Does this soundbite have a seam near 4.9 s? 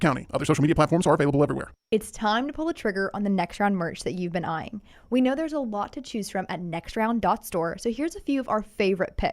no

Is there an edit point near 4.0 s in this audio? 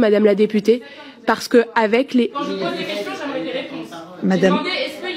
yes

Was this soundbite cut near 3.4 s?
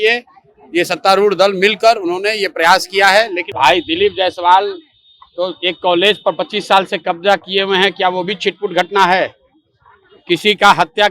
yes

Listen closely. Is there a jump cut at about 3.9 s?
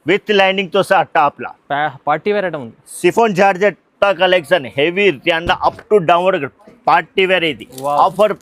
yes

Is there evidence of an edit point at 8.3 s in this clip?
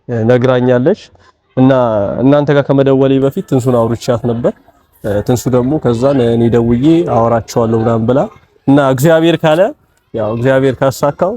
no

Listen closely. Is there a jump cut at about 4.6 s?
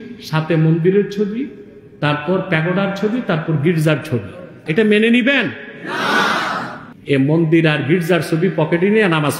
yes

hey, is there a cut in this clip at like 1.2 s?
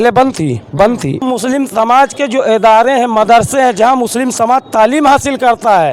yes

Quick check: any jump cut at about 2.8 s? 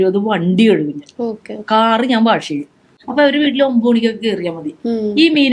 no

